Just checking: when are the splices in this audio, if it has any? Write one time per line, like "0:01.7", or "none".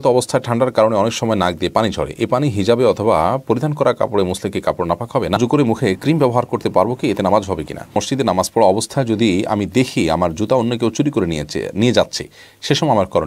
0:05.4
0:08.0